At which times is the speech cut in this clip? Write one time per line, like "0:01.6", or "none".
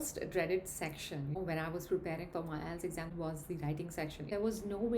0:01.3
0:03.1
0:04.3